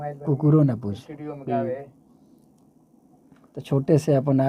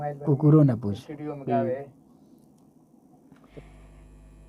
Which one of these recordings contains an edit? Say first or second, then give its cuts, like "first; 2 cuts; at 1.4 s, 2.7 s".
second; 1 cut; at 3.5 s